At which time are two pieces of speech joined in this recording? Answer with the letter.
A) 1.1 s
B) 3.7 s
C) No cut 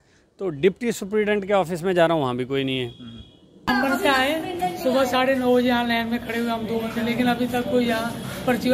B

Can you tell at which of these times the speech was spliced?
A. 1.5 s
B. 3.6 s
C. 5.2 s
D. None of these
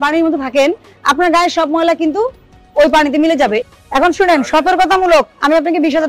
B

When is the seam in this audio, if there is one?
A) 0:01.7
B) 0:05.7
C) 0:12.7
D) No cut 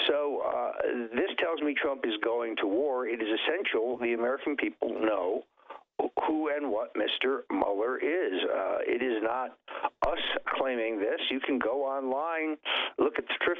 D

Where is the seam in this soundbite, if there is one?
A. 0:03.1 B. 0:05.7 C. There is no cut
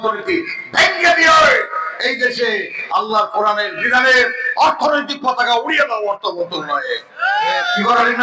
C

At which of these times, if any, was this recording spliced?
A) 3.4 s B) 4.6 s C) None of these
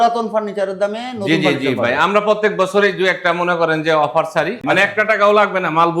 B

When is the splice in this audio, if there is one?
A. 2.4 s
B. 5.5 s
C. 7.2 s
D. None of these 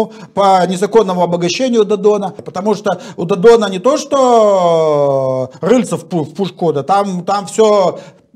A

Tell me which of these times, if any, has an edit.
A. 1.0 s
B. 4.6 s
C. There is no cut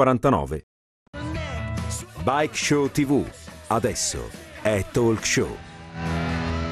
A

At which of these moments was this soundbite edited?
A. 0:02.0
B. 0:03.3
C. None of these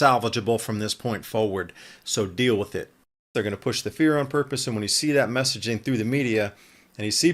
B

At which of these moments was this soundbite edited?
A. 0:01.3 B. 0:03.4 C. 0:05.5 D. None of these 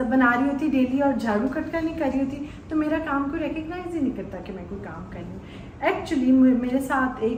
D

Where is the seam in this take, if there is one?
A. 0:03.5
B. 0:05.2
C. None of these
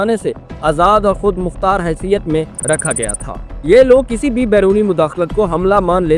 C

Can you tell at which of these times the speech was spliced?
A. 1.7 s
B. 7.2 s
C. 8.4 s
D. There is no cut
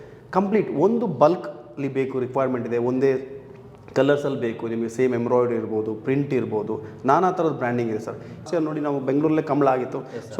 C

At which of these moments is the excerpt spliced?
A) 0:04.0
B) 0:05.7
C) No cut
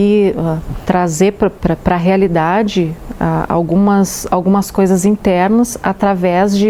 C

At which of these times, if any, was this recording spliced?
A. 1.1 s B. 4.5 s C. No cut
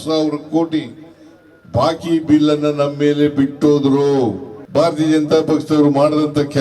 B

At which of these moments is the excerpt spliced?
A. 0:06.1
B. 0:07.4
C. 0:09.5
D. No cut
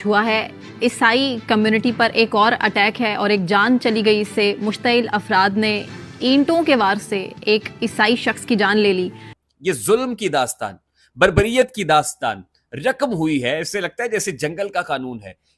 C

